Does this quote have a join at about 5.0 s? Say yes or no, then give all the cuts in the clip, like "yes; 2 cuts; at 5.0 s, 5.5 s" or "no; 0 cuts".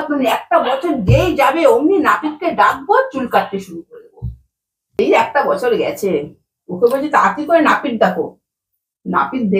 yes; 1 cut; at 5.0 s